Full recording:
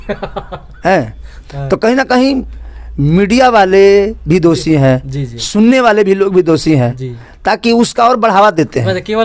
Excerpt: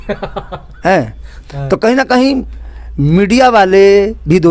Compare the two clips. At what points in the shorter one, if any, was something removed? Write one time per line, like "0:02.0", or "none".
none